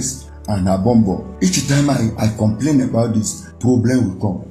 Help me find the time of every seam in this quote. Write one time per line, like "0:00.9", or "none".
0:01.3
0:03.4

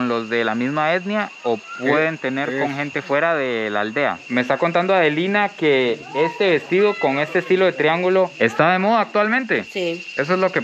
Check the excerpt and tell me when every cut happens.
0:04.2

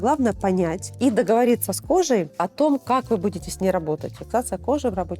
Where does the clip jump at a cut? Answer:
0:04.1

